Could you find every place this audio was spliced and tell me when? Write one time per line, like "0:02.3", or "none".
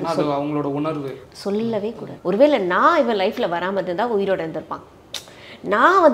0:02.0